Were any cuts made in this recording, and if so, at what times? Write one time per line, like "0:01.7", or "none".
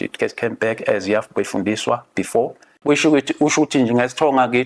0:02.7